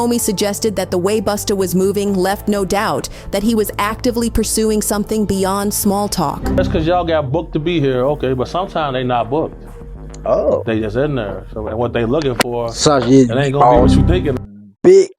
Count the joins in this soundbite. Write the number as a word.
two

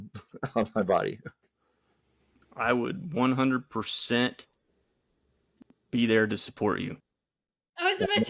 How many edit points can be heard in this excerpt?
zero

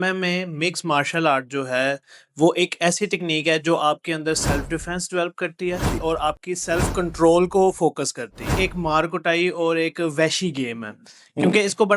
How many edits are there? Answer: one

